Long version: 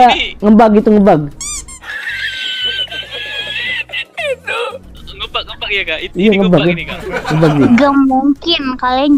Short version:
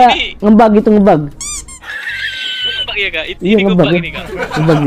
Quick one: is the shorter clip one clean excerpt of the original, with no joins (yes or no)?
no